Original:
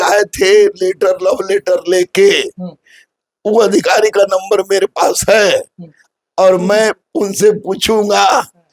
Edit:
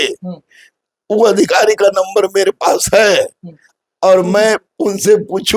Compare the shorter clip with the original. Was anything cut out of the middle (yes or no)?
no